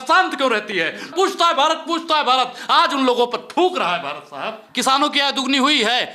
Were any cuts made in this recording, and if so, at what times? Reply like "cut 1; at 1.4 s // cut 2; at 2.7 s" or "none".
cut 1; at 1.1 s // cut 2; at 4.7 s